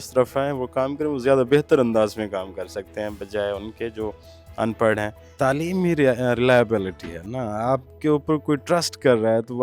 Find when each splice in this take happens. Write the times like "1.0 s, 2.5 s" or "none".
5.2 s